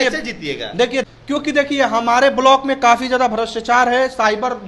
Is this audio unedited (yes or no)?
no